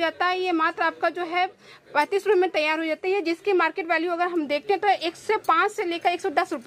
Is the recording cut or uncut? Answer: uncut